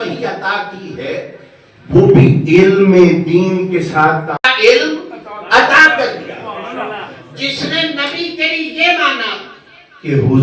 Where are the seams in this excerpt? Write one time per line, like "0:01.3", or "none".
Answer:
0:04.4